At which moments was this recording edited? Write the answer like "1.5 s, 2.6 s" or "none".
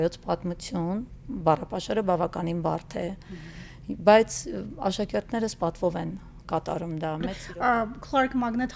7.4 s